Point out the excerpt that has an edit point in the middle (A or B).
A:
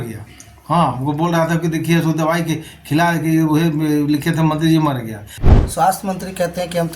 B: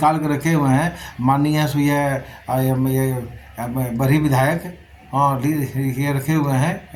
A